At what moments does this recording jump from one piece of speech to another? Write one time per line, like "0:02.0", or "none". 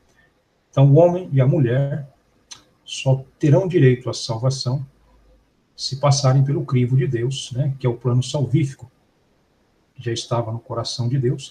0:04.2